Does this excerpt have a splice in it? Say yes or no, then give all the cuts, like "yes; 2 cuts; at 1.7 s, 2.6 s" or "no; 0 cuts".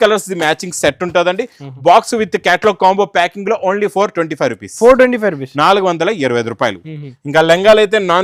no; 0 cuts